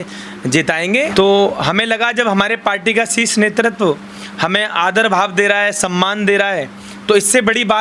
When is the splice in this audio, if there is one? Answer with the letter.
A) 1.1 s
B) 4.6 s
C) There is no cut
A